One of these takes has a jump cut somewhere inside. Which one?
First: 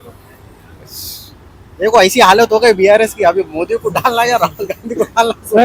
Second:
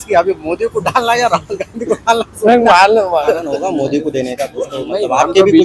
second; 1 cut; at 3.5 s

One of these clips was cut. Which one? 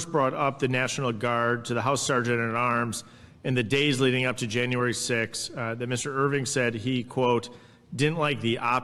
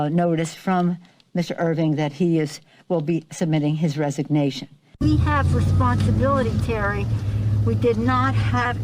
second; 1 cut; at 4.9 s

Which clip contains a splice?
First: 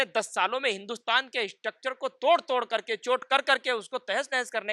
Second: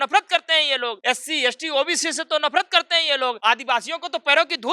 second; 2 cuts; at 1.0 s, 3.4 s

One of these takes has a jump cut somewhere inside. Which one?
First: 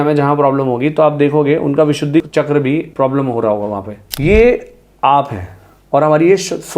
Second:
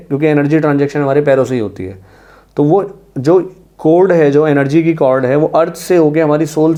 first; 2 cuts; at 2.3 s, 4.1 s

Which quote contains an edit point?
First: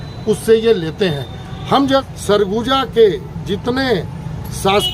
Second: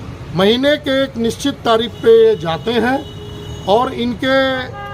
first; 1 cut; at 2.1 s

